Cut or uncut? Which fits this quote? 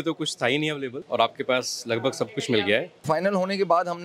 cut